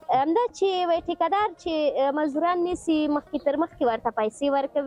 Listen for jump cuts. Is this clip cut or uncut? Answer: uncut